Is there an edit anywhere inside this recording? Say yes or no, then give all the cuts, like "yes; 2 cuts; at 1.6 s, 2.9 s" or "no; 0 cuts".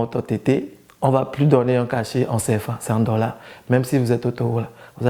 no; 0 cuts